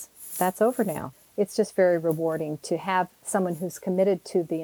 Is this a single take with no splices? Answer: no; 1 cut; at 1.2 s

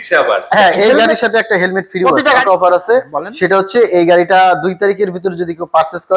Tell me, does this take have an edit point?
yes; 1 cut; at 2.3 s

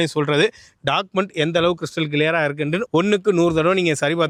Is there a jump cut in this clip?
no; 0 cuts

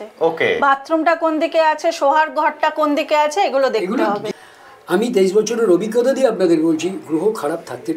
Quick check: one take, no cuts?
no; 1 cut; at 4.2 s

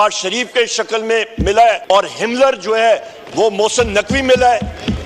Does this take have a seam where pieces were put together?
yes; 1 cut; at 1.8 s

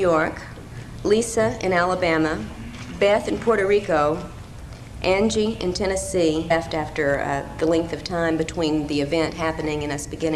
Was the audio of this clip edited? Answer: no; 0 cuts

